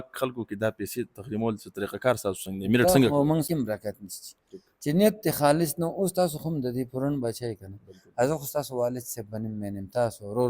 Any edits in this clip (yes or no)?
yes